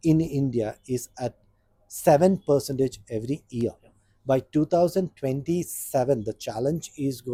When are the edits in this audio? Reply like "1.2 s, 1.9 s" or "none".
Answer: none